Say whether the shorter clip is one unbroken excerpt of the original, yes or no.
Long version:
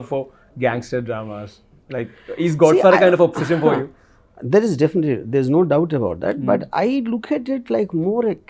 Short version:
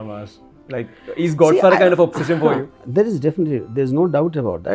no